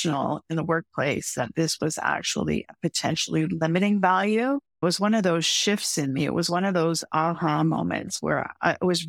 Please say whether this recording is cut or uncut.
cut